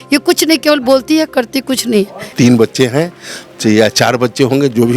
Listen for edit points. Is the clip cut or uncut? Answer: cut